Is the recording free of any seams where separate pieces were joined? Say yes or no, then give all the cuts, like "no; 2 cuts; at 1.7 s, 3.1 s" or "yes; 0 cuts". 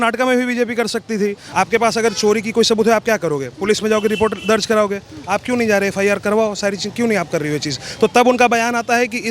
no; 1 cut; at 1.4 s